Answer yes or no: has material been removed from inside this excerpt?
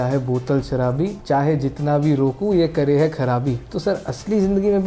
yes